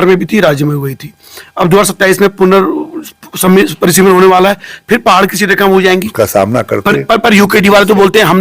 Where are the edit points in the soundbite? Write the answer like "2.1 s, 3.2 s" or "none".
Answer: 6.1 s